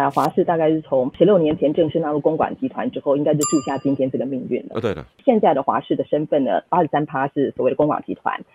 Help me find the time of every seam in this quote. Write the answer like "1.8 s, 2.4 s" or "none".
1.1 s, 5.2 s, 6.7 s